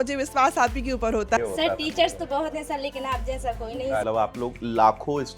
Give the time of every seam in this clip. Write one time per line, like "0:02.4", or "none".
0:01.4
0:04.0